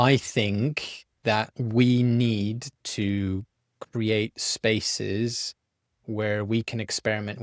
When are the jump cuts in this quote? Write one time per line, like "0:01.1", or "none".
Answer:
0:01.6